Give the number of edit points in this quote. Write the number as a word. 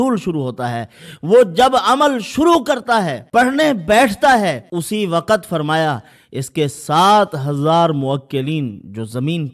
two